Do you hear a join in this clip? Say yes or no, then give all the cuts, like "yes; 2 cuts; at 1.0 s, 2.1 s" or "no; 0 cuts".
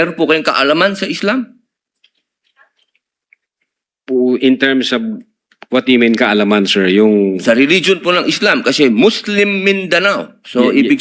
no; 0 cuts